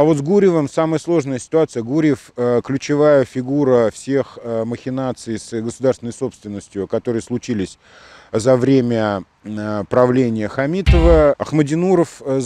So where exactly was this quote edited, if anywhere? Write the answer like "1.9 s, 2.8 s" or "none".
11.4 s